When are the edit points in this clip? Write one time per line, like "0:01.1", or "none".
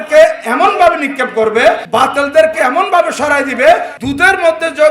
0:01.8
0:04.0